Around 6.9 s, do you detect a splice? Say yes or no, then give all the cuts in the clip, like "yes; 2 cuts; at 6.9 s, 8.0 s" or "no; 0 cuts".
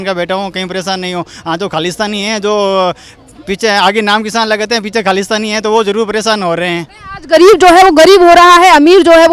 yes; 1 cut; at 6.9 s